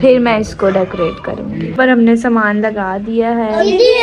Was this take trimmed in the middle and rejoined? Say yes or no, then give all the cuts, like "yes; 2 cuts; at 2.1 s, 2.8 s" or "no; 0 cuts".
yes; 1 cut; at 1.7 s